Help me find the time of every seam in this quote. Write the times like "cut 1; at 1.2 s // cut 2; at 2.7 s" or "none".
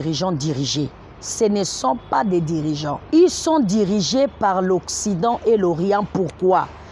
cut 1; at 3.0 s